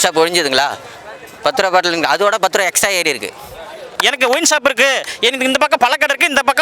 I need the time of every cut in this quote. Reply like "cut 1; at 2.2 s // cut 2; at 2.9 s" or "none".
cut 1; at 3.9 s